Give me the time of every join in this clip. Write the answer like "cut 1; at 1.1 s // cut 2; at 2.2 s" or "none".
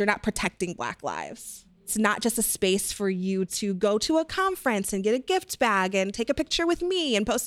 cut 1; at 1.9 s